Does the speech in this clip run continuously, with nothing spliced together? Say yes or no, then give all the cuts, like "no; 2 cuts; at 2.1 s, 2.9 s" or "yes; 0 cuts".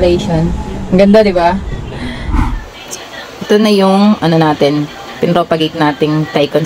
no; 1 cut; at 2.3 s